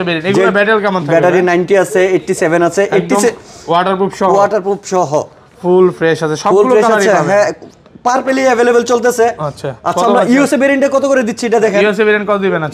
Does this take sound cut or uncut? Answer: uncut